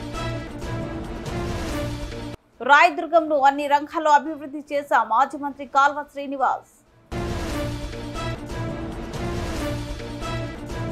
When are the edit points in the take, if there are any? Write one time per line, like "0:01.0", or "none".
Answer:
0:01.8